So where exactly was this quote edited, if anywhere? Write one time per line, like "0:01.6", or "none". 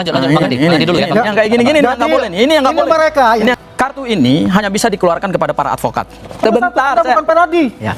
0:03.5
0:06.4